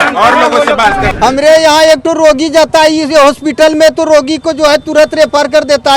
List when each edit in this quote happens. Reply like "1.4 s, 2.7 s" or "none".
1.1 s